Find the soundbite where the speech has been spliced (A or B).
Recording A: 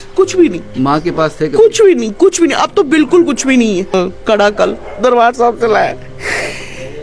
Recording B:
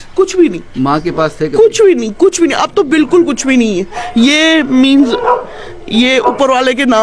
A